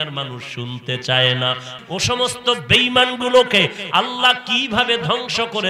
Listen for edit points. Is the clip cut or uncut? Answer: cut